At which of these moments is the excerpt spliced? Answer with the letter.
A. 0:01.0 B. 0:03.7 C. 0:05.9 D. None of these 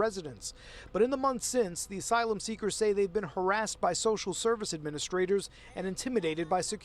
A